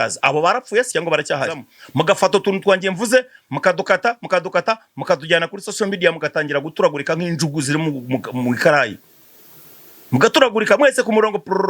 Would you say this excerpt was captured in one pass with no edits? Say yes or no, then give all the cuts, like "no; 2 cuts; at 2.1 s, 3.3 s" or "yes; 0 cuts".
no; 1 cut; at 1.7 s